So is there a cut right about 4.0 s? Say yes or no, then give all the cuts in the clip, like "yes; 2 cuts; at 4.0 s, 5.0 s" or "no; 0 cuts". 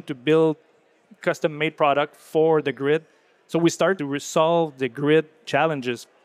yes; 3 cuts; at 1.7 s, 4.0 s, 5.4 s